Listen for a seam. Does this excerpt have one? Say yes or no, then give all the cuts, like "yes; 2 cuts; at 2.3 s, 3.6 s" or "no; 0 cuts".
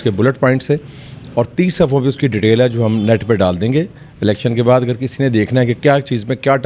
no; 0 cuts